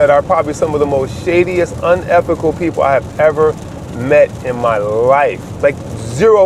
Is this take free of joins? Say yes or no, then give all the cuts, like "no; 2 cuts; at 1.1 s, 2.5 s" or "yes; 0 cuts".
yes; 0 cuts